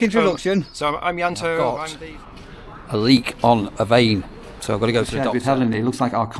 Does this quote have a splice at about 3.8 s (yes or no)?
no